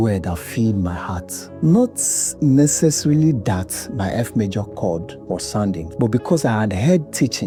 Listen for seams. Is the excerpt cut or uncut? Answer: uncut